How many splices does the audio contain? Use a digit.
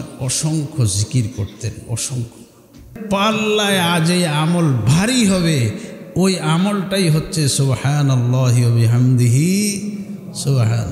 1